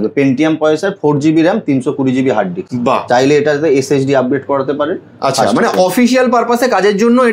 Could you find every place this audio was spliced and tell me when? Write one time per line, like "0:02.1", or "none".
none